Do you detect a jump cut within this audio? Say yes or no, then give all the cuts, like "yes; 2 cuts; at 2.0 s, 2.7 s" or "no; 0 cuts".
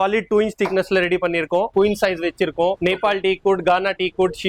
yes; 2 cuts; at 1.7 s, 2.8 s